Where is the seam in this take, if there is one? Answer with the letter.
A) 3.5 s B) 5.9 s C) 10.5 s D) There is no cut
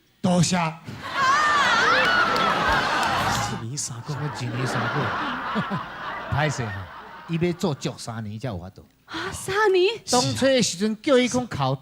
A